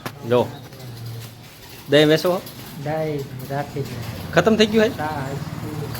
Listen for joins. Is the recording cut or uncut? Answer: uncut